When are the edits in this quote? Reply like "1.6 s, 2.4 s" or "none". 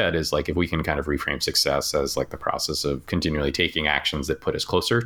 3.0 s